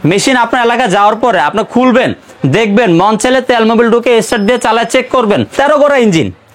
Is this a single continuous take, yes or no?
no